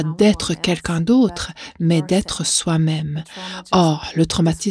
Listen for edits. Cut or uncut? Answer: uncut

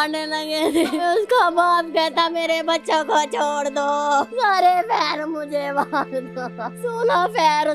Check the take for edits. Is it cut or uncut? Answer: cut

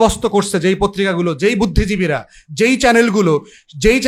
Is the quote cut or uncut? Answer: uncut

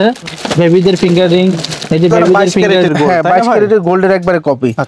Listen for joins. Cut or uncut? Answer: cut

